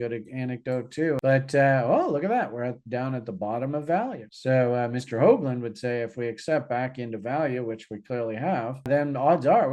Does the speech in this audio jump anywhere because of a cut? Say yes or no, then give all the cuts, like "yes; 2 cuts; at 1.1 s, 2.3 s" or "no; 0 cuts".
yes; 1 cut; at 1.2 s